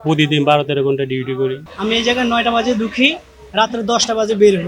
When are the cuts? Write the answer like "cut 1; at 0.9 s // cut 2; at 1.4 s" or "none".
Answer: cut 1; at 1.7 s